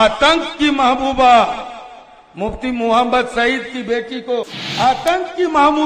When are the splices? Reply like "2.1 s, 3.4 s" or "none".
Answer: 4.6 s